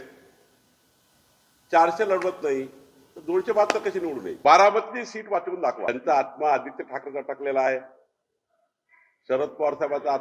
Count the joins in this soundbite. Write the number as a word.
one